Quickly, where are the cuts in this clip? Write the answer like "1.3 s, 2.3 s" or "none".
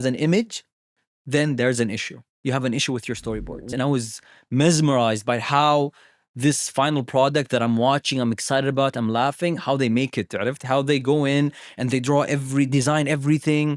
3.7 s